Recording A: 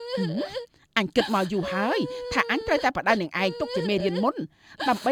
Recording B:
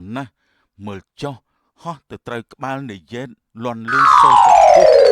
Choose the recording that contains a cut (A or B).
B